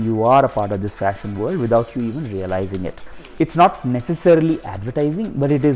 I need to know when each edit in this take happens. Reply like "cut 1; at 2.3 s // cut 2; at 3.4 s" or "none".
cut 1; at 3.2 s